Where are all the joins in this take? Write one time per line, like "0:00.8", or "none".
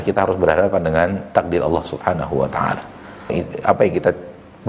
0:03.3